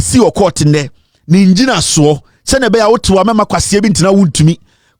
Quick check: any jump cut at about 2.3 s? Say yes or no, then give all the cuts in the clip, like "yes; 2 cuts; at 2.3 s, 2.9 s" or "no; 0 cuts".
no; 0 cuts